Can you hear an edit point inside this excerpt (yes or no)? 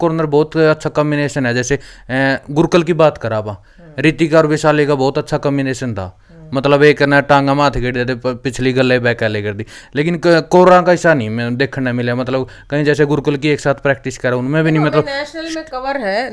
no